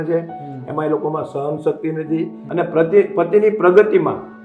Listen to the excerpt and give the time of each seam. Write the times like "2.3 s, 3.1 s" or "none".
2.4 s